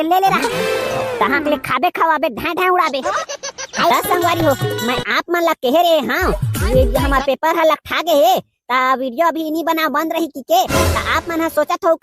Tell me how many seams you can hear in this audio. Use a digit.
1